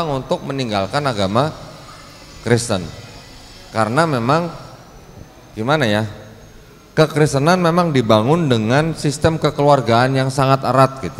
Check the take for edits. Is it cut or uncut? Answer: uncut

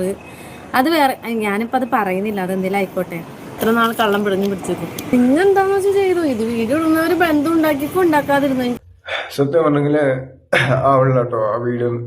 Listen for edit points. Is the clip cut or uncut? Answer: cut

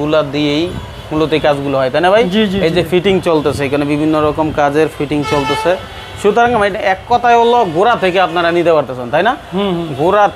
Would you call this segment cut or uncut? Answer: uncut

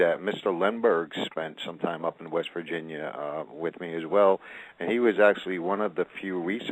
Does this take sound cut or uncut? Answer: cut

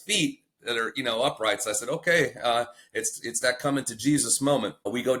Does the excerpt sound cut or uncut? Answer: uncut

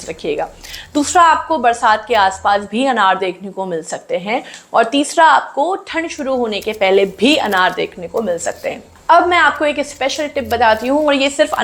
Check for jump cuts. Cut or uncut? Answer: uncut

